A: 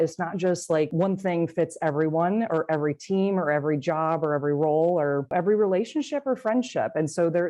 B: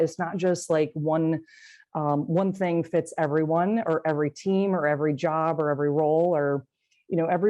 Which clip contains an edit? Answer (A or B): A